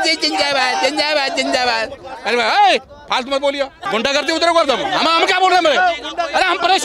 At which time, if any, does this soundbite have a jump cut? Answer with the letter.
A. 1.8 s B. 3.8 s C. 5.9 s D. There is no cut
B